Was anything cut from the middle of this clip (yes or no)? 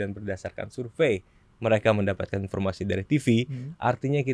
no